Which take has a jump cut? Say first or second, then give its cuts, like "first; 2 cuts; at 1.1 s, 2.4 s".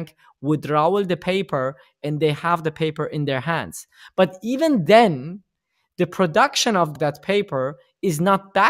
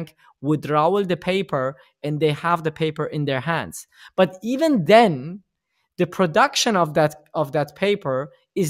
first; 1 cut; at 6.9 s